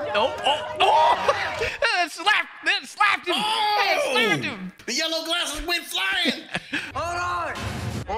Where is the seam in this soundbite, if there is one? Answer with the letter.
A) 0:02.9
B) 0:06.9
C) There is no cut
B